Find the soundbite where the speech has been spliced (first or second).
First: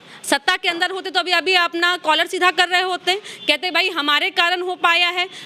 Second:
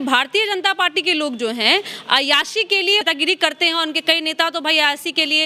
second